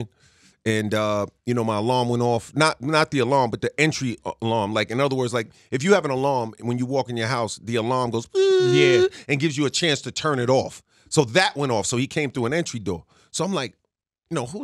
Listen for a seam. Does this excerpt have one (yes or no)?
no